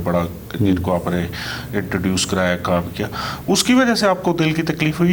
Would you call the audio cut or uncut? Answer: uncut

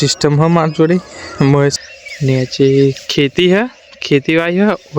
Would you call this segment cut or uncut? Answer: cut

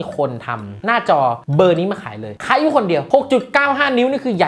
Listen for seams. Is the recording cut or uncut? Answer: uncut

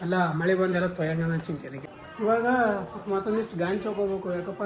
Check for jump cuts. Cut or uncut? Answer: cut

